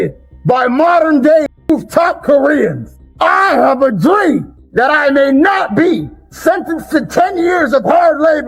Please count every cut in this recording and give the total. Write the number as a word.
zero